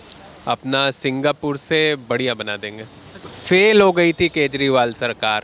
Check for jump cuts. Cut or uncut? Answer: cut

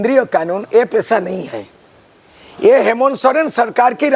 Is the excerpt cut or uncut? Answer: uncut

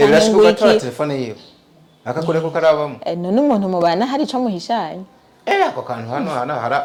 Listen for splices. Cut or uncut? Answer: uncut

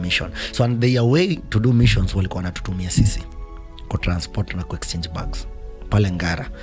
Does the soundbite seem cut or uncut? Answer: uncut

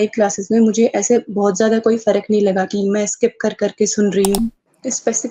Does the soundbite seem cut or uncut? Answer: cut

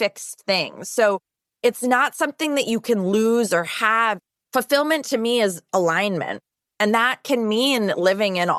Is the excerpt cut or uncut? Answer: uncut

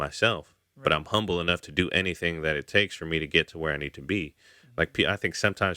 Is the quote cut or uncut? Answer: uncut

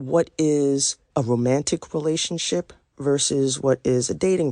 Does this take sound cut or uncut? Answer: cut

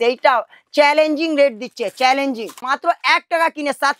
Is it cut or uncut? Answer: cut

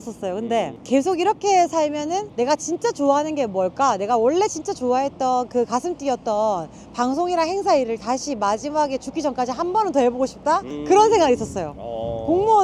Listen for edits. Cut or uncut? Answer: uncut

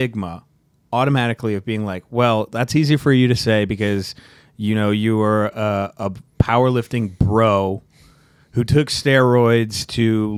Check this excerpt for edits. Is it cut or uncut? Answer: uncut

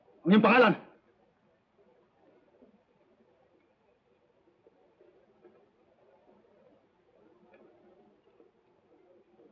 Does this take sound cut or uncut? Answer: uncut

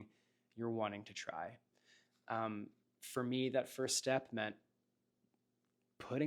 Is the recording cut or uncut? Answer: uncut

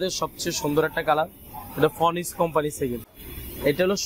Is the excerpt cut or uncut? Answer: uncut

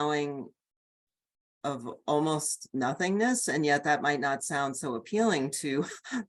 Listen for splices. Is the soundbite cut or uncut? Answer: uncut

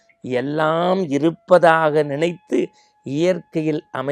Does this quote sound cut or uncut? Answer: uncut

